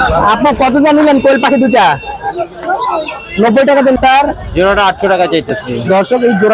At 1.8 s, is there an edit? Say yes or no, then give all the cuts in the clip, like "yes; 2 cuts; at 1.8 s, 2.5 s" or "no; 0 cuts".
no; 1 cut; at 4.0 s